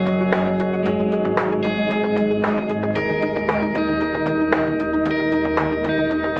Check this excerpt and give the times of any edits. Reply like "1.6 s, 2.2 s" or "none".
4.0 s